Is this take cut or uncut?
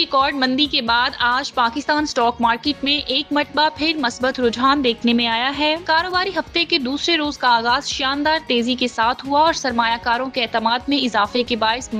uncut